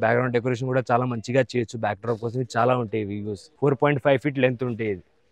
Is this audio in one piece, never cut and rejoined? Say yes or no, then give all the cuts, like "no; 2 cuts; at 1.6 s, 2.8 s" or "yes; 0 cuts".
no; 1 cut; at 3.4 s